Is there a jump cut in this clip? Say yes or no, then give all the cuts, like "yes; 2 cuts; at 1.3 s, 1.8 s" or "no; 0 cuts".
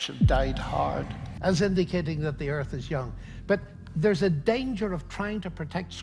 yes; 1 cut; at 1.3 s